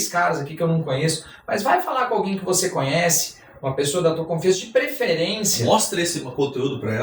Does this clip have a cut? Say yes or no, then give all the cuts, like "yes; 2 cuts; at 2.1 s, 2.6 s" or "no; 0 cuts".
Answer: no; 0 cuts